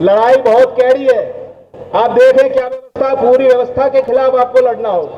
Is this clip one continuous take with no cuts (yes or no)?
yes